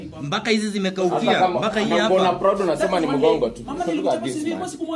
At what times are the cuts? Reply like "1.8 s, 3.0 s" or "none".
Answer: none